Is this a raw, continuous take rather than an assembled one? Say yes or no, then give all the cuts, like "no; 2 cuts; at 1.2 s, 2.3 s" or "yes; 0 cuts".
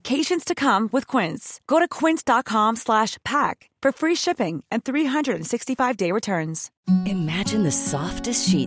no; 1 cut; at 6.7 s